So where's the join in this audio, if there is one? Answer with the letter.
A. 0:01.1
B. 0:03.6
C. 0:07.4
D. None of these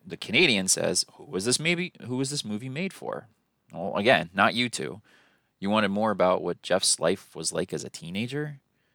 D